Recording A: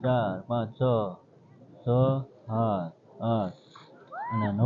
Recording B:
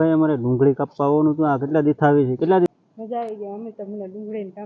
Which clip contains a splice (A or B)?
B